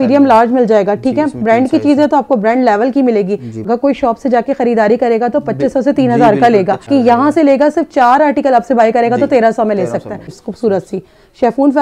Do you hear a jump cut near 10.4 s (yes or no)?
yes